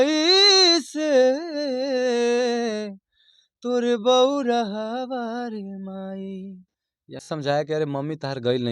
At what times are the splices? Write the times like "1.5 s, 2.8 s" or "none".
7.2 s